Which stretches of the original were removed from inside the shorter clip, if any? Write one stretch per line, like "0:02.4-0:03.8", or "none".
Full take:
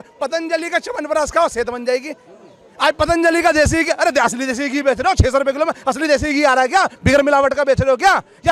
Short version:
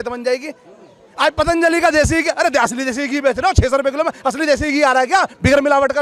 none